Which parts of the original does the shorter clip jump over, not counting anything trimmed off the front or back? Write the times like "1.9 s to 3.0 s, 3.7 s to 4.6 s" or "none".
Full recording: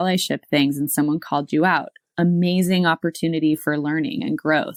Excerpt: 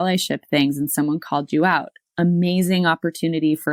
none